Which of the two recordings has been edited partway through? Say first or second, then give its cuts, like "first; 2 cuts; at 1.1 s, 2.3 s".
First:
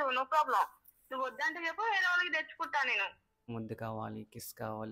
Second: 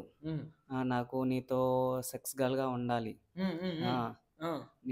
first; 1 cut; at 3.5 s